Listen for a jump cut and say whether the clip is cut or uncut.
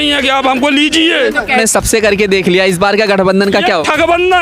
cut